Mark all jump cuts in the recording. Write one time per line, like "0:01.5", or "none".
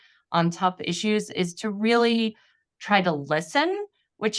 none

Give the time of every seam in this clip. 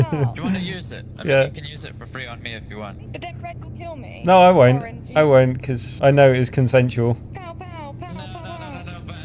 0:03.0

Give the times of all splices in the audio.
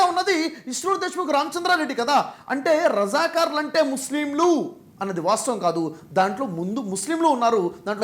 none

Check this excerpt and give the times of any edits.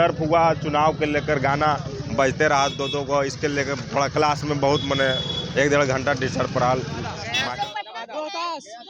0:07.2

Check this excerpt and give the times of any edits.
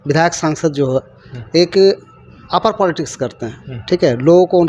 none

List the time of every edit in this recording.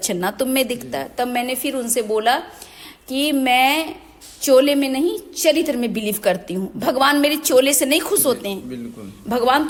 none

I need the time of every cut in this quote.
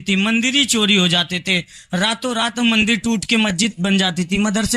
none

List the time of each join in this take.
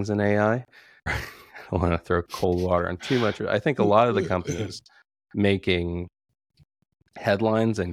0:01.1

